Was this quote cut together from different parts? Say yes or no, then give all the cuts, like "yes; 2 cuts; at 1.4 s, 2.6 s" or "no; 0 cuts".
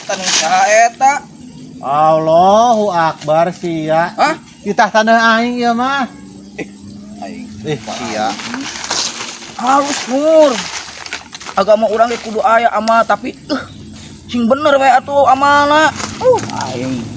no; 0 cuts